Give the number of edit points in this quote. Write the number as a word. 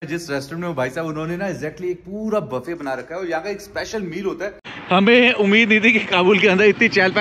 one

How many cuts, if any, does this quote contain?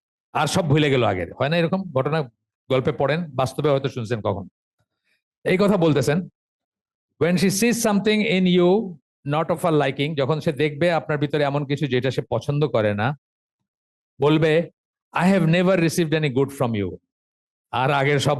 zero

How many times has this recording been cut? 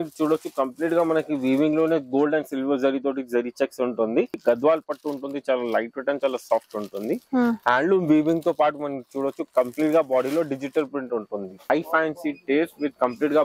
two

